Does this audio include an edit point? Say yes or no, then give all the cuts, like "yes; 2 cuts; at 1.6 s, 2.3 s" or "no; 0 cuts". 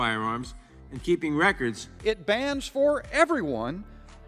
yes; 1 cut; at 1.9 s